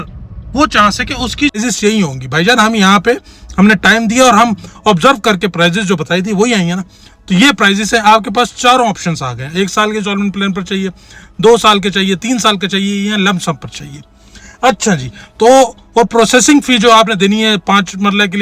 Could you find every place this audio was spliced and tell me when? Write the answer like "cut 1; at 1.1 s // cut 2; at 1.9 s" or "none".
cut 1; at 1.5 s